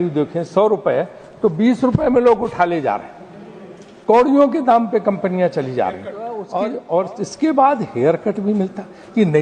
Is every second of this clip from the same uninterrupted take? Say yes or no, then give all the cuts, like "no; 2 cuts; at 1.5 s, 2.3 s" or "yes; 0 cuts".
no; 1 cut; at 6.5 s